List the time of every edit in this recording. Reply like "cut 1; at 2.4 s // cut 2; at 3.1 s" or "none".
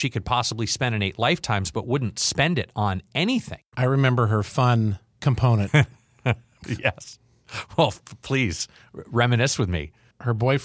cut 1; at 3.6 s // cut 2; at 6.6 s